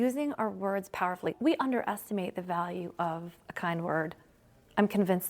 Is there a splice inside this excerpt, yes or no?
yes